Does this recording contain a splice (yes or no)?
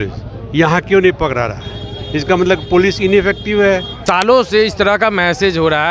yes